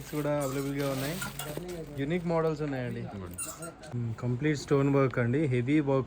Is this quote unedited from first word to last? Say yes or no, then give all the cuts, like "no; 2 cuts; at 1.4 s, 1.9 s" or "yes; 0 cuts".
no; 1 cut; at 3.9 s